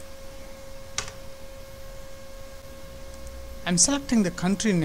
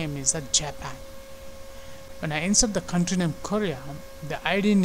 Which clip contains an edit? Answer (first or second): second